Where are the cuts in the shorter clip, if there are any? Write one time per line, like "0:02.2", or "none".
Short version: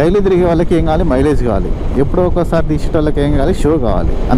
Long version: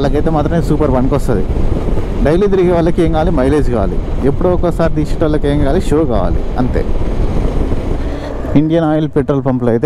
none